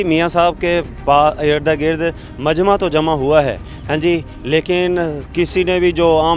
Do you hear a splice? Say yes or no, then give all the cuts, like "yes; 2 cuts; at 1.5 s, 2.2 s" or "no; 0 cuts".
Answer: no; 0 cuts